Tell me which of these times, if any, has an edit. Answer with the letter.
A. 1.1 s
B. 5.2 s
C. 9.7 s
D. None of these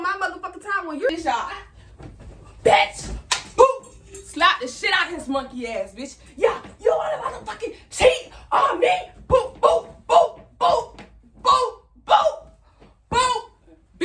A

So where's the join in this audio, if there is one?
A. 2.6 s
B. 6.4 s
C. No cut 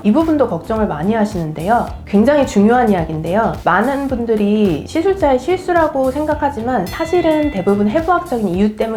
C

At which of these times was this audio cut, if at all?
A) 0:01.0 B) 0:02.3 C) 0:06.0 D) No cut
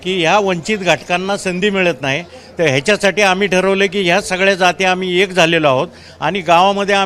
D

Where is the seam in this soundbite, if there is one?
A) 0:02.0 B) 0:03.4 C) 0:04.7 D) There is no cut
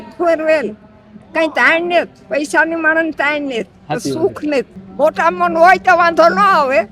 C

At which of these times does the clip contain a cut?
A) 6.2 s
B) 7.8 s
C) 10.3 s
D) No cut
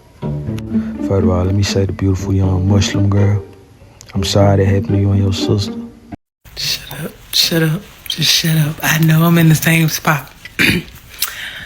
A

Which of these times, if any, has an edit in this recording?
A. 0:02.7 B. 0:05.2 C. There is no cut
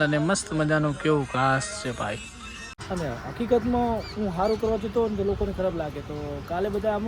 A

